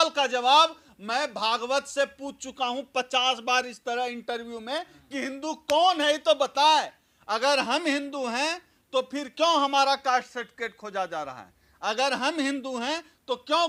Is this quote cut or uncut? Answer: uncut